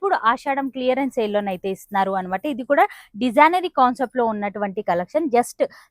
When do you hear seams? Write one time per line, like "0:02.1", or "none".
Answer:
none